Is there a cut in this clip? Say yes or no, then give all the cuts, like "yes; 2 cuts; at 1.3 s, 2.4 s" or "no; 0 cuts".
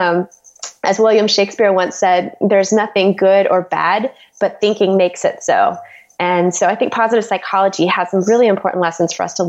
no; 0 cuts